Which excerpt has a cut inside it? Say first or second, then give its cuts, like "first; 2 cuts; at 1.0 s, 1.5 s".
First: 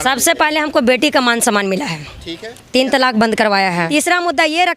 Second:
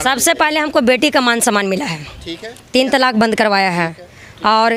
first; 1 cut; at 3.9 s